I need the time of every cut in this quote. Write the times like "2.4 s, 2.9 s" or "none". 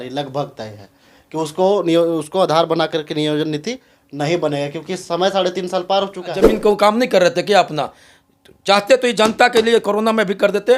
6.5 s